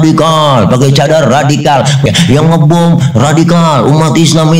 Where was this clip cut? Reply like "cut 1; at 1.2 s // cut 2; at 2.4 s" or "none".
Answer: cut 1; at 2.1 s